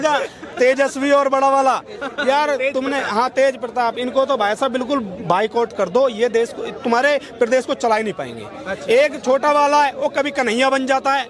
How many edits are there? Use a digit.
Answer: 0